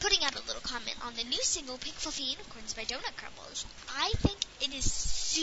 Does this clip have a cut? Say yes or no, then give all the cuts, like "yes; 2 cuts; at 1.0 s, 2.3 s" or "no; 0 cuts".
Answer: no; 0 cuts